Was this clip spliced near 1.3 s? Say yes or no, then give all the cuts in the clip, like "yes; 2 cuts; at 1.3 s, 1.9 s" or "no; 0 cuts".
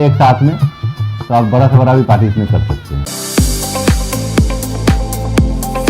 no; 1 cut; at 3.0 s